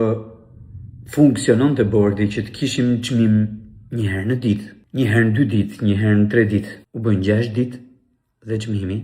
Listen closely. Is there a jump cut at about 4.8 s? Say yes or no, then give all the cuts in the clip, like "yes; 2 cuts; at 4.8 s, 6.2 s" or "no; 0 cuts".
yes; 2 cuts; at 4.8 s, 6.8 s